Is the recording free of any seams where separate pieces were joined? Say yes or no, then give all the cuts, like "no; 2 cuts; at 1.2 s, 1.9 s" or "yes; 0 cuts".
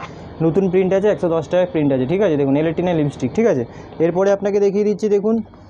yes; 0 cuts